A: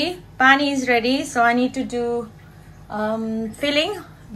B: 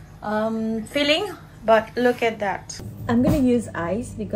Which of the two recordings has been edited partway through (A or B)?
B